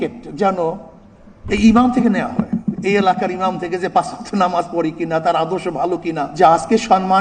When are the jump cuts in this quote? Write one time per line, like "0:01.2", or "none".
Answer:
0:06.3